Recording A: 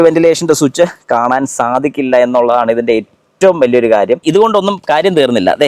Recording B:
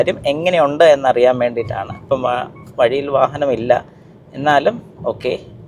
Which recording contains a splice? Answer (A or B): A